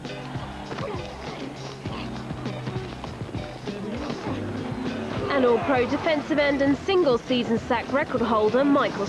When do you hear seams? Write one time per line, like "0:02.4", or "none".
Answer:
0:08.2